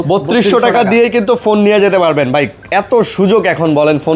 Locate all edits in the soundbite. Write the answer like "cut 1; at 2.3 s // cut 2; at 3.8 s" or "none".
none